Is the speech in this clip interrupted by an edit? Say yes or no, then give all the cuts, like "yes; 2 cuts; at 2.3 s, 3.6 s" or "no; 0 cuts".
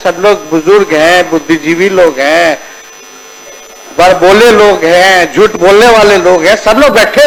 no; 0 cuts